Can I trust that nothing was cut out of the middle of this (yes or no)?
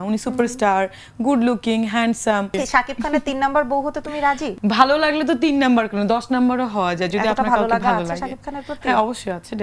no